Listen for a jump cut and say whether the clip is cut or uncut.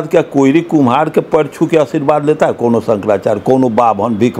uncut